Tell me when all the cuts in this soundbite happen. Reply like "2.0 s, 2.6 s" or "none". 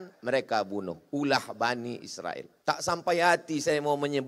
2.5 s